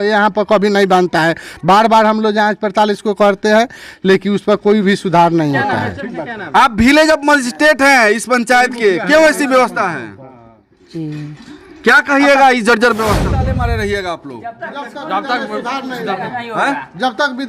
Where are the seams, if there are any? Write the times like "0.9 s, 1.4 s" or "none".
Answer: 13.4 s